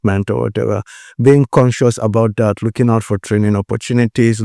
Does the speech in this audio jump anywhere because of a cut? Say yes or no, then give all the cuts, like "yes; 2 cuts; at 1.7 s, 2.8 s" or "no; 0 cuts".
no; 0 cuts